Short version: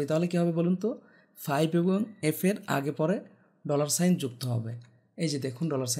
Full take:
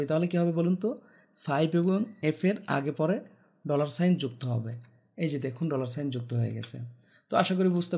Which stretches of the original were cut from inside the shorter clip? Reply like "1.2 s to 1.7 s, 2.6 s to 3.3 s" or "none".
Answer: none